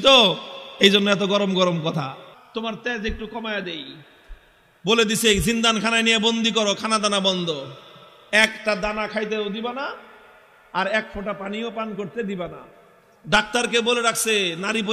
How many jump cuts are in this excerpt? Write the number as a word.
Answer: one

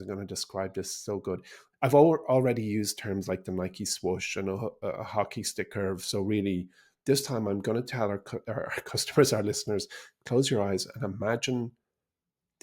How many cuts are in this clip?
one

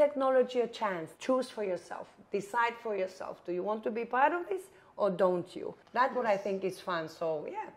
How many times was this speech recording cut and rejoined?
two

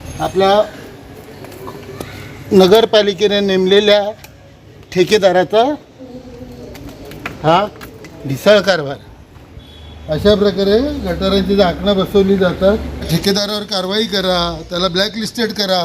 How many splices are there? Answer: one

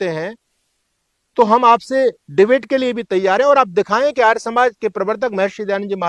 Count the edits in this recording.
zero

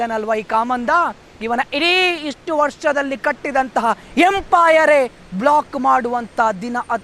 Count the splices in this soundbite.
zero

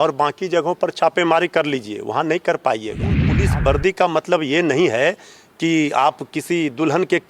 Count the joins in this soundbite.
one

